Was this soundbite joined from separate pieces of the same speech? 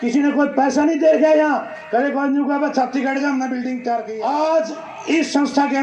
yes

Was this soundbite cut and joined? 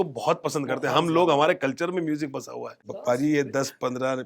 yes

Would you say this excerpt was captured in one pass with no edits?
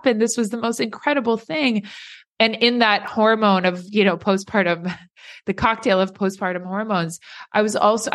yes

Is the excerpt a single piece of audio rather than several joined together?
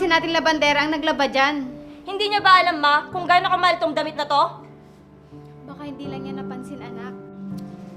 yes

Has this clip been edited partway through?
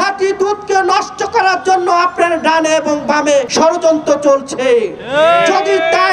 no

